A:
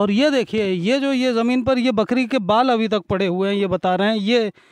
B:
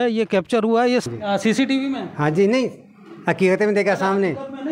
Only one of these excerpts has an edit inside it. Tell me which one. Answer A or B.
B